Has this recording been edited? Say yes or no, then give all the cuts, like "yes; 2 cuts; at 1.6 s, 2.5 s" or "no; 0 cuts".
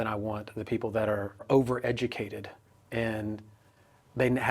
yes; 1 cut; at 1.4 s